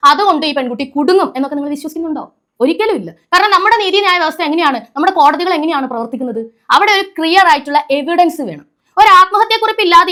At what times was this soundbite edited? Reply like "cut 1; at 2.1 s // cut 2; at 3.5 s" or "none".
none